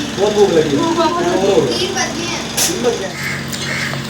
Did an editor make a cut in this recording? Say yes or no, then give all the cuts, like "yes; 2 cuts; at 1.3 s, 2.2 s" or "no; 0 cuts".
yes; 2 cuts; at 1.1 s, 3.2 s